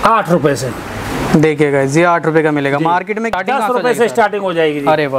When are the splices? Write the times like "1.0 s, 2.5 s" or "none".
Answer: 3.3 s